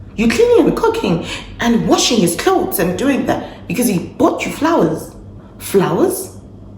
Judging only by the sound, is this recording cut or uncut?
uncut